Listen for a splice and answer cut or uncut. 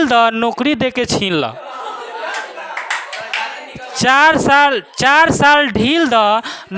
cut